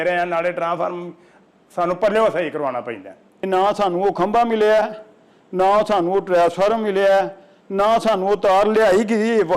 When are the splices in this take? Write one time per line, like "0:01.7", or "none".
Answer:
0:03.5